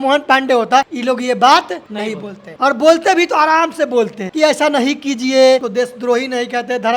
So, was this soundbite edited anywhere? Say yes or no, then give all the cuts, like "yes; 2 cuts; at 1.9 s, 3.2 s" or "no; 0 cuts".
yes; 4 cuts; at 0.9 s, 2.0 s, 4.2 s, 5.7 s